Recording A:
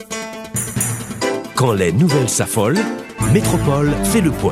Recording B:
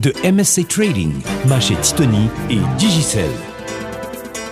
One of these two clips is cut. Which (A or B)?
B